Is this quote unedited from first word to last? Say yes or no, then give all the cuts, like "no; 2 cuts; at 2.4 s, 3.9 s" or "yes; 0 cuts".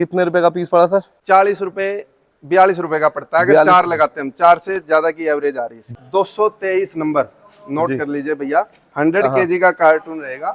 no; 2 cuts; at 1.1 s, 5.9 s